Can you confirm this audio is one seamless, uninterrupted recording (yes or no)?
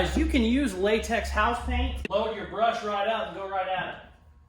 no